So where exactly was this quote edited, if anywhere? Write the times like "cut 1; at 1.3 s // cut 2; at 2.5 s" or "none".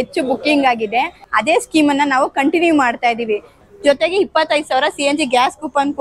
cut 1; at 1.2 s // cut 2; at 3.6 s